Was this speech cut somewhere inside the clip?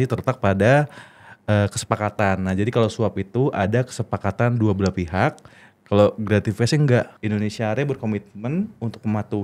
yes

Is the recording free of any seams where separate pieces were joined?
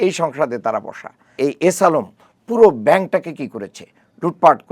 no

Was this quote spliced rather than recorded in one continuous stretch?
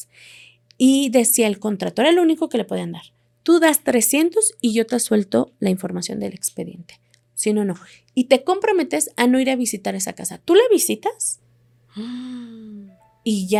no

